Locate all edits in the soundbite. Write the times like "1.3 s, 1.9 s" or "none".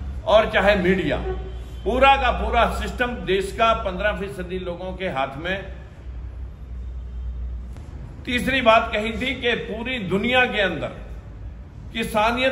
7.8 s